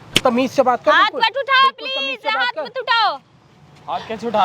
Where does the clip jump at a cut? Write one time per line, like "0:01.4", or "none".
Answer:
none